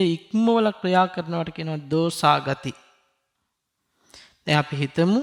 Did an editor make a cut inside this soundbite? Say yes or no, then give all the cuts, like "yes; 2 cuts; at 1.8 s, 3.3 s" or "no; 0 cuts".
no; 0 cuts